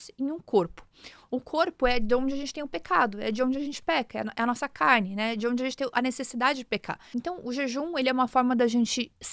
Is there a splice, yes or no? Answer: yes